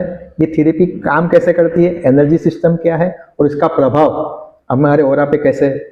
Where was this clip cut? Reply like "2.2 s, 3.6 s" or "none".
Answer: none